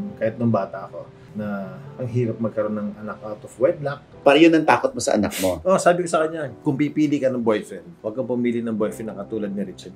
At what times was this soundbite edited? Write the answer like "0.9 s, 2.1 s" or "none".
4.1 s